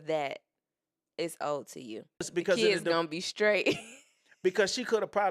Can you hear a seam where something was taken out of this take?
yes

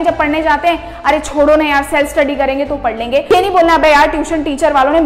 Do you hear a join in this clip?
yes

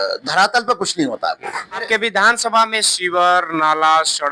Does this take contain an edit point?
yes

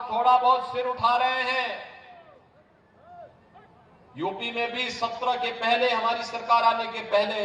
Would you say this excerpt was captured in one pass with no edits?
yes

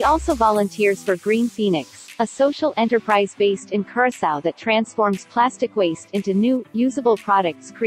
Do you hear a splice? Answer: no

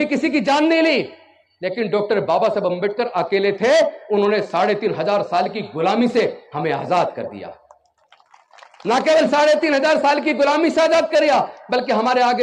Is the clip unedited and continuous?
yes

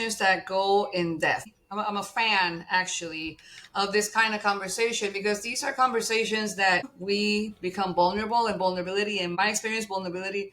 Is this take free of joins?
no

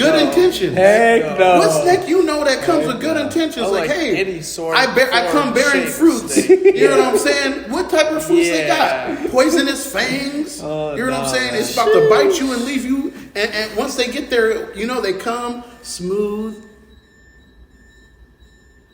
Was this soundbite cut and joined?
no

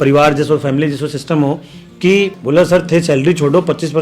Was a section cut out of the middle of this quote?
yes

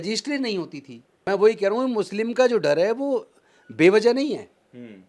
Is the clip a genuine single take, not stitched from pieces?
no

